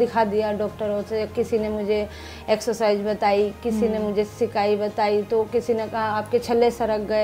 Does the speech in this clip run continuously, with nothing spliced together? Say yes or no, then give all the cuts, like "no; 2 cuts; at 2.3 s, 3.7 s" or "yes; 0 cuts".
yes; 0 cuts